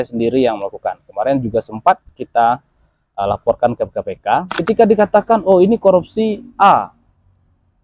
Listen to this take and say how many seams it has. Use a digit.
1